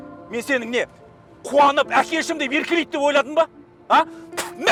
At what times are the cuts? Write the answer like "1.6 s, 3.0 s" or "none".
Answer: none